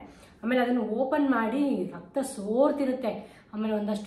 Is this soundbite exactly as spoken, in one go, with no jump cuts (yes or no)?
yes